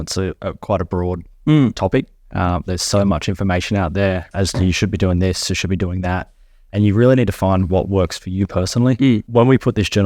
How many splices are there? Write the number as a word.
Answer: two